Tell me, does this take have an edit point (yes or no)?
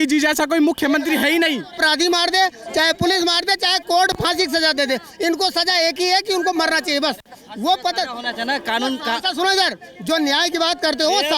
no